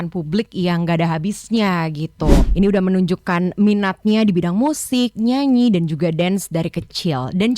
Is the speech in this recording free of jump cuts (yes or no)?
no